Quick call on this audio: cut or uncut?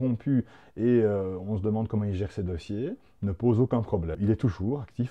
cut